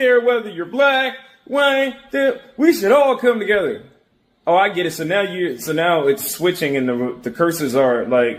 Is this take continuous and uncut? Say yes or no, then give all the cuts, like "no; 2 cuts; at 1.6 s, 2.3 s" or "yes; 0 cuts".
yes; 0 cuts